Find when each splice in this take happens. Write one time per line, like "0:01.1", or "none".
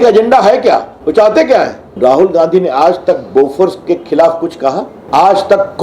0:00.9
0:01.8
0:04.9